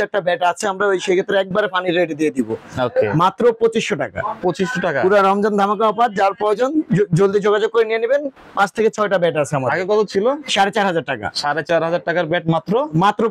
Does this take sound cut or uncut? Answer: uncut